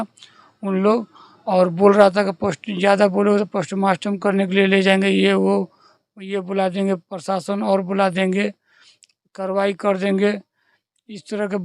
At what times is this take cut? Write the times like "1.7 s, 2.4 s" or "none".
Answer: none